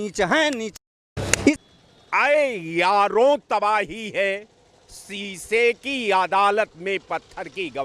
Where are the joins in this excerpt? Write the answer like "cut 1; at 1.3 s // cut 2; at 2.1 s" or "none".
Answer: cut 1; at 1.4 s